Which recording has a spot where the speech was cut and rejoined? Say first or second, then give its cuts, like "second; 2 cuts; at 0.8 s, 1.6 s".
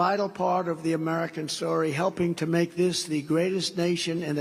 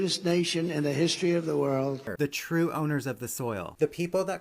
second; 1 cut; at 2.0 s